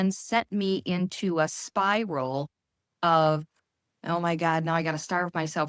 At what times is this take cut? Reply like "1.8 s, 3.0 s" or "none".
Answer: none